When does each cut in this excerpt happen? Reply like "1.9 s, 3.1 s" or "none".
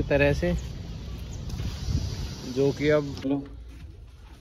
3.3 s